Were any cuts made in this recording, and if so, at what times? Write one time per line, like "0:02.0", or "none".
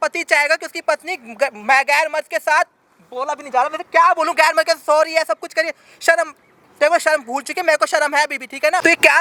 none